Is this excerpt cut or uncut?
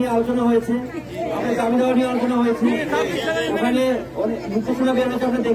uncut